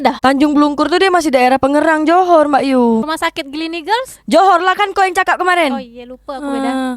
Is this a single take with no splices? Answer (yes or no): no